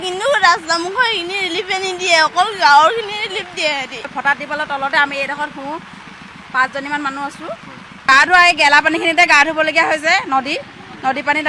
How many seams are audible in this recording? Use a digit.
2